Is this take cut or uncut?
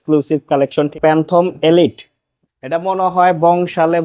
cut